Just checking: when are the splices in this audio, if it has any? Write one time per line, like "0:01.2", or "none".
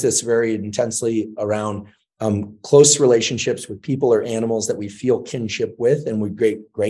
none